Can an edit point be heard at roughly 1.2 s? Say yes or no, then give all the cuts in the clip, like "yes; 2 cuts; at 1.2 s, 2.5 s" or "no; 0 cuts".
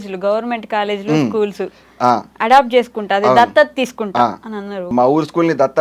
no; 1 cut; at 4.9 s